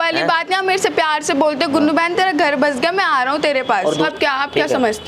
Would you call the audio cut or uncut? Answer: cut